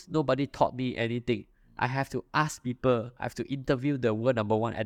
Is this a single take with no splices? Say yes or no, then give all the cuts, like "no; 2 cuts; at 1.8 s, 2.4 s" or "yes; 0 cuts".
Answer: yes; 0 cuts